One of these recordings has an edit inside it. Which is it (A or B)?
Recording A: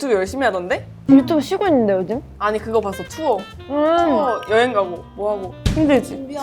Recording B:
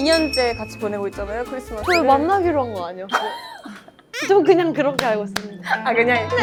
A